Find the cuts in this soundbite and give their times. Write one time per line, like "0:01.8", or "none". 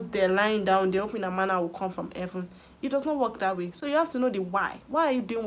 none